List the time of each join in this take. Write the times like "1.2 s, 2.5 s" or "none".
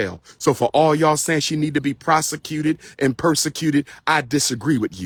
none

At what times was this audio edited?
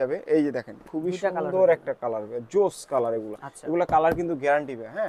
none

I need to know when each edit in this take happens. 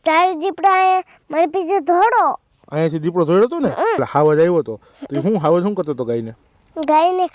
4.1 s

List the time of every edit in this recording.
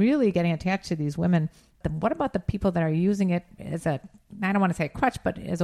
1.9 s

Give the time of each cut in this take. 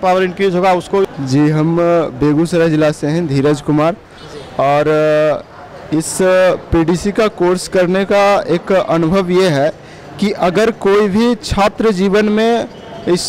1.1 s

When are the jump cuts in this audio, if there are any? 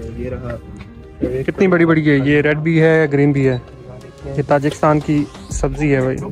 none

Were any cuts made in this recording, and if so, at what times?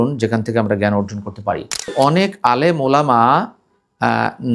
1.9 s

